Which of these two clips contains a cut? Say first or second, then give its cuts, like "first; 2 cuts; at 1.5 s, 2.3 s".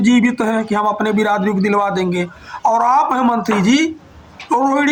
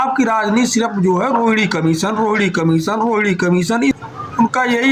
second; 1 cut; at 4.0 s